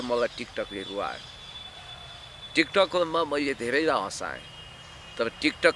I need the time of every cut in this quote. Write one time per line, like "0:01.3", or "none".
none